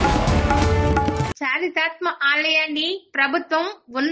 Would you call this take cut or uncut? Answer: cut